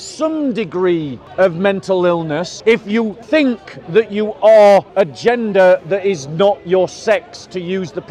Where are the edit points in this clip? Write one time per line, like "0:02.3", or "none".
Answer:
0:01.2
0:02.5
0:03.2
0:04.9